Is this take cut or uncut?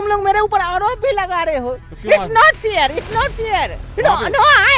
cut